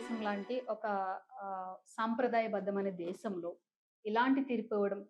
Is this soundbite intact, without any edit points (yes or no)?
yes